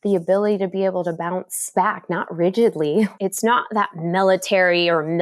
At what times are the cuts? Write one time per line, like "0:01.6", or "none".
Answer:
0:01.7
0:03.1

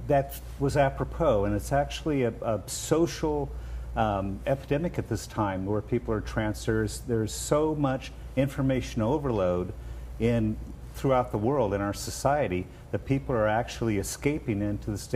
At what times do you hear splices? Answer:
0:04.6

